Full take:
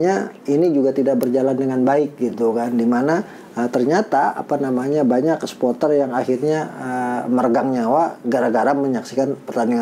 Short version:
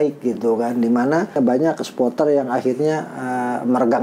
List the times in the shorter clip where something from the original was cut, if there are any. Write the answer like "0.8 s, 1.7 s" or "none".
1.4 s